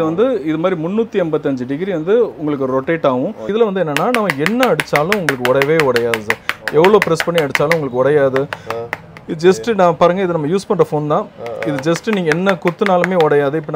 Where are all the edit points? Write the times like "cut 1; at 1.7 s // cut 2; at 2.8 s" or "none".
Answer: cut 1; at 3.5 s